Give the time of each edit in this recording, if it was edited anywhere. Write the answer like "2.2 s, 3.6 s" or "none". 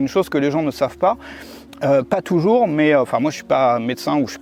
none